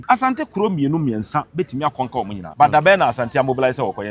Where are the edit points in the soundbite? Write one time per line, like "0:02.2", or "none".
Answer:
0:02.4